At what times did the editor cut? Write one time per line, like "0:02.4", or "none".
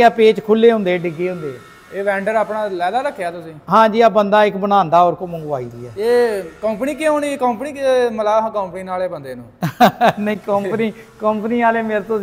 none